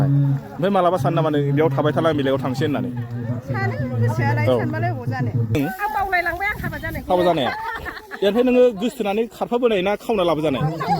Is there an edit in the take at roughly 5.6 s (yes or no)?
yes